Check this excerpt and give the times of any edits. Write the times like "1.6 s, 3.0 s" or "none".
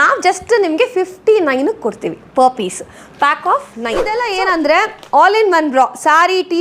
4.1 s